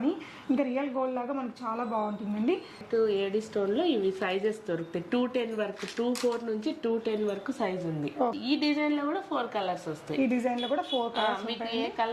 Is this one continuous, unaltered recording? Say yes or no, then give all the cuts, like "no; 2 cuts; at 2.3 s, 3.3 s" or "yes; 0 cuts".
no; 2 cuts; at 2.8 s, 8.4 s